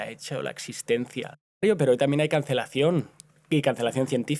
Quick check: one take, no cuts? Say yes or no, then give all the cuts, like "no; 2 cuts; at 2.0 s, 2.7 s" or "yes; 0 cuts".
no; 1 cut; at 1.5 s